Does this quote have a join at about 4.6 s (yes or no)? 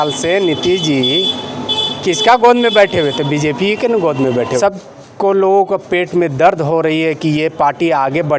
yes